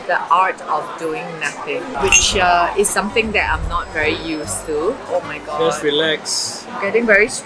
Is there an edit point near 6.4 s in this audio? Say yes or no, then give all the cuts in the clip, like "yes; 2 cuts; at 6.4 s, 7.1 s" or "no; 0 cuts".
no; 1 cut; at 5.0 s